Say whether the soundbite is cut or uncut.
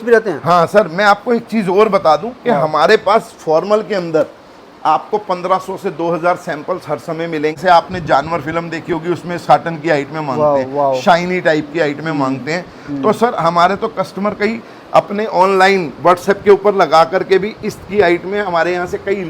cut